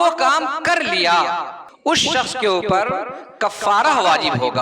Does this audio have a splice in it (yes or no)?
yes